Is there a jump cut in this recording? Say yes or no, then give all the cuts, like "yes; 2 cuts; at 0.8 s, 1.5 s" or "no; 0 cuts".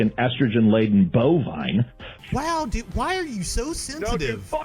yes; 1 cut; at 2.1 s